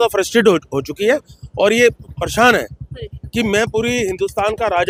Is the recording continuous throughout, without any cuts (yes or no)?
yes